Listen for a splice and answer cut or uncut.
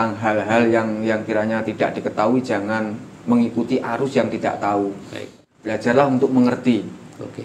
uncut